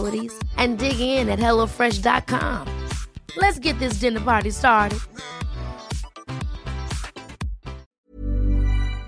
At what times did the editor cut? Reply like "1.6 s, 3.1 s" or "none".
7.9 s

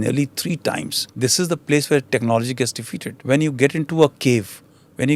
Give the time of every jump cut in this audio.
1.0 s, 3.2 s

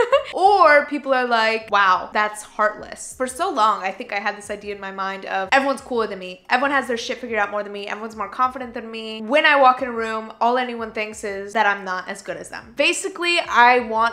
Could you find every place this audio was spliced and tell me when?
1.6 s, 3.1 s, 11.5 s, 12.6 s

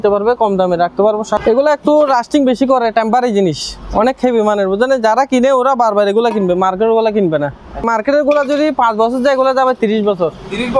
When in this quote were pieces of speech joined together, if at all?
1.4 s, 7.8 s

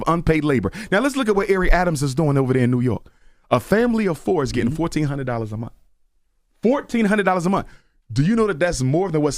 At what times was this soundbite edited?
3.1 s

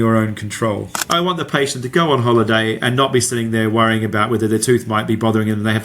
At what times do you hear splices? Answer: 1.0 s

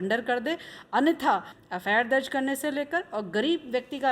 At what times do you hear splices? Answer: 1.6 s

